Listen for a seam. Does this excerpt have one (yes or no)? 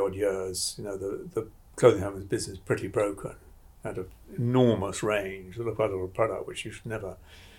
yes